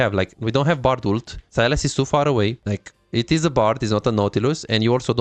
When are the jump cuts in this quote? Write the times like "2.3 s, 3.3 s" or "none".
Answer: 1.4 s, 2.6 s